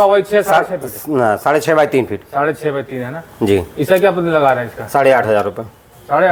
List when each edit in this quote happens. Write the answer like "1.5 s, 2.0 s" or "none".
none